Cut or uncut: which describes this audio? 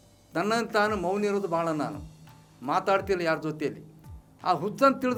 uncut